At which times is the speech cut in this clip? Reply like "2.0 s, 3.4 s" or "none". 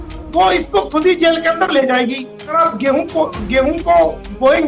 2.6 s